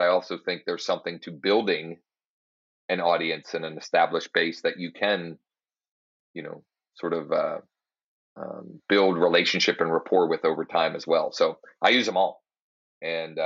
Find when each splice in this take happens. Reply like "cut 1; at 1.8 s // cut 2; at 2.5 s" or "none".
none